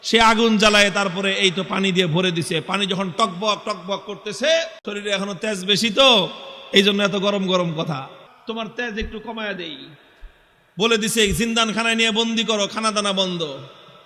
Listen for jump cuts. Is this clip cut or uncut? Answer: cut